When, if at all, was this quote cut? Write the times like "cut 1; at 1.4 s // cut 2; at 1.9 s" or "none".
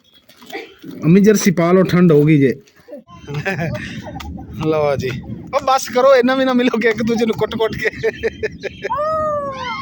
cut 1; at 2.7 s